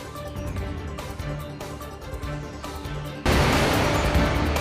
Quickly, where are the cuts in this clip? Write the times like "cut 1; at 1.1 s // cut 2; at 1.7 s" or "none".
cut 1; at 2.7 s